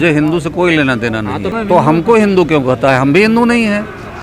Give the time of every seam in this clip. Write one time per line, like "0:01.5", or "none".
0:01.5